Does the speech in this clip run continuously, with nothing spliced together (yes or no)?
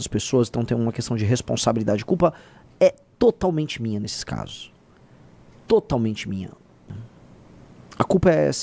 no